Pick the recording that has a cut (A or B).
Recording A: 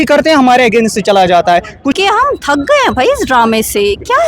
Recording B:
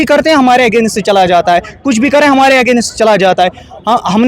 A